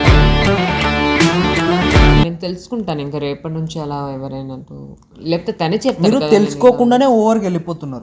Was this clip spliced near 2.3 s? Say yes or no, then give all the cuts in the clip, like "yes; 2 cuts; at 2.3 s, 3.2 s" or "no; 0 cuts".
yes; 1 cut; at 2.3 s